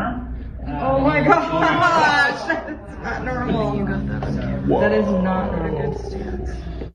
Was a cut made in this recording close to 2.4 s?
no; 0 cuts

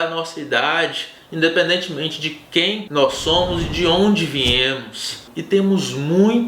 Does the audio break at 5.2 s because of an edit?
yes; 1 cut; at 5.2 s

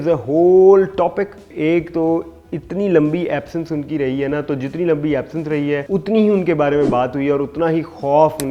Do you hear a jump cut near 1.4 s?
yes; 1 cut; at 1.4 s

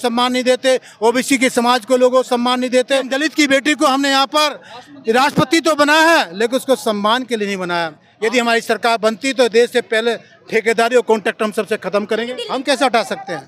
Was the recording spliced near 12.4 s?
yes; 3 cuts; at 3.1 s, 8.0 s, 12.4 s

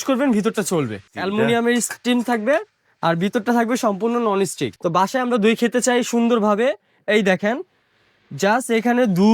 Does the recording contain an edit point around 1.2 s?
yes; 2 cuts; at 1.2 s, 4.7 s

